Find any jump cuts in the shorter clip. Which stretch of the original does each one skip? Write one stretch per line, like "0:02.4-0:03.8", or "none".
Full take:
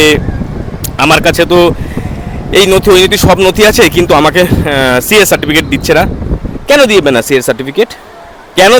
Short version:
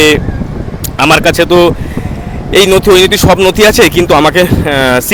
none